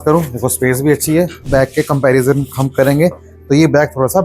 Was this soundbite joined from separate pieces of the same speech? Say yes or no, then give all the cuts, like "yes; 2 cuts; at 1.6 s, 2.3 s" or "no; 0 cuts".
yes; 1 cut; at 1.4 s